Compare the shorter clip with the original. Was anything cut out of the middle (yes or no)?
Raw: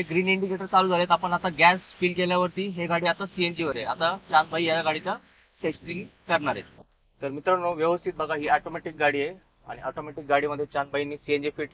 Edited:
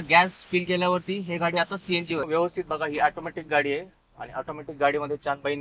yes